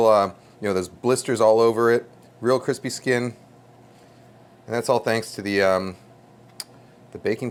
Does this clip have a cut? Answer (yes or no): no